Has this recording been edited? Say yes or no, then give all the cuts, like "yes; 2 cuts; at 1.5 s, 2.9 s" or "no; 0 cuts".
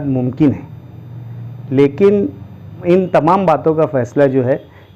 yes; 1 cut; at 2.8 s